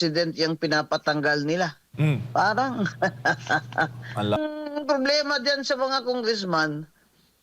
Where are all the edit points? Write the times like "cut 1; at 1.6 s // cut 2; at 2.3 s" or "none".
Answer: cut 1; at 4.4 s